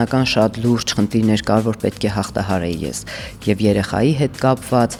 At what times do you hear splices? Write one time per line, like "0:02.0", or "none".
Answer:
none